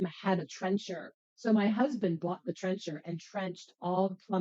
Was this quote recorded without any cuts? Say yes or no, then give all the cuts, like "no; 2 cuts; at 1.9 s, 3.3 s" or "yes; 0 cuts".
no; 1 cut; at 1.0 s